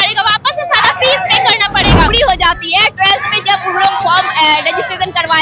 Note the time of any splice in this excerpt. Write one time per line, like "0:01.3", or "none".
0:02.1